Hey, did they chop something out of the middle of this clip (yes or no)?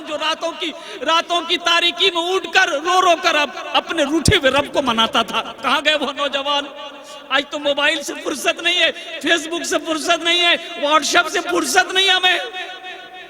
no